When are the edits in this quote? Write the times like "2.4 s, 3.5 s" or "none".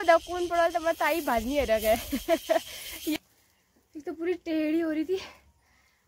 3.2 s

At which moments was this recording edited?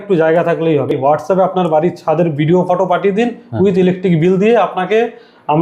0.9 s

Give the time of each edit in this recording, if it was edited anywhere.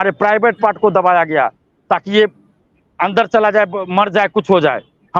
none

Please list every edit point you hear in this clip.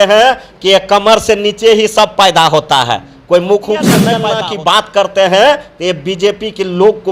4.2 s

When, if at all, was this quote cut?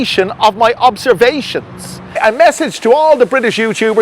2.2 s

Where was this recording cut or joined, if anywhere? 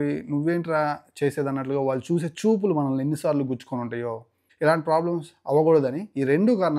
4.4 s

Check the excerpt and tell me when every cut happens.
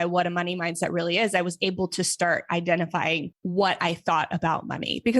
3.3 s

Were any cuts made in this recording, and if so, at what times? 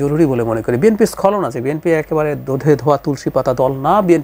none

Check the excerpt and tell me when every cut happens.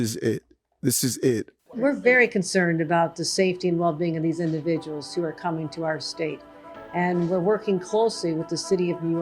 1.5 s

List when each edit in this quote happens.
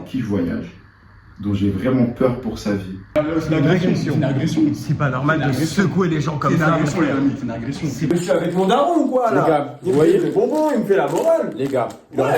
3.1 s, 8.1 s

